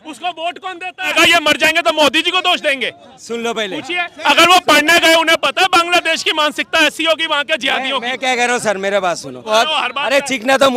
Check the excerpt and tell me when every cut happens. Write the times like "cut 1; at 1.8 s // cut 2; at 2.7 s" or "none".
cut 1; at 1.1 s // cut 2; at 9.5 s